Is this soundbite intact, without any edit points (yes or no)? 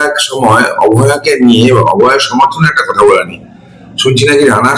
yes